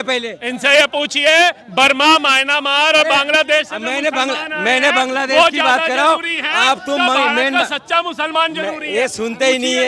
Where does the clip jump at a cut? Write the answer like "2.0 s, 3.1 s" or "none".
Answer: none